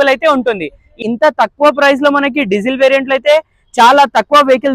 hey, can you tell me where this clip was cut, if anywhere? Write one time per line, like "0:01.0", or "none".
0:01.1